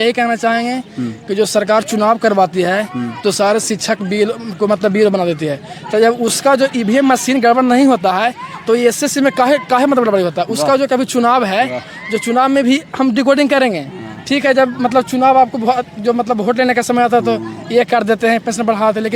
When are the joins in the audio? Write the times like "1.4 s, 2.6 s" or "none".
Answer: none